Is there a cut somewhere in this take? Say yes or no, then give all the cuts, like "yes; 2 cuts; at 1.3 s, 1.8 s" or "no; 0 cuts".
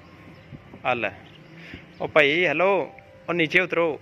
no; 0 cuts